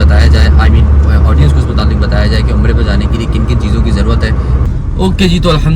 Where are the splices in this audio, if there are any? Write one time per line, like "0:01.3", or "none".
0:04.6